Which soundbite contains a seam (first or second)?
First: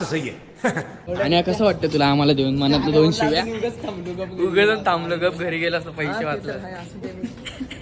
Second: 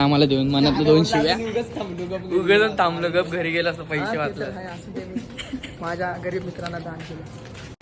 first